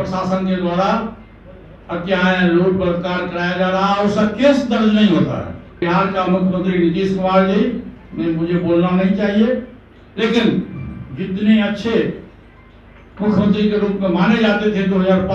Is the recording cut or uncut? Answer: cut